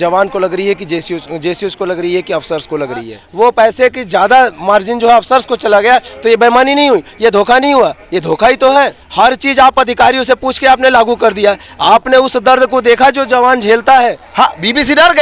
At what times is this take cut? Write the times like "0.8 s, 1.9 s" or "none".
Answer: 3.2 s, 9.0 s, 14.2 s